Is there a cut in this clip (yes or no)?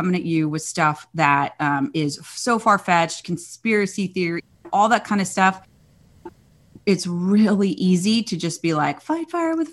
no